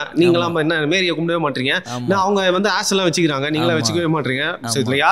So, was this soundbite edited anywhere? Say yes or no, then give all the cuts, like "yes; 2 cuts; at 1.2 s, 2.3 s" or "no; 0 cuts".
no; 0 cuts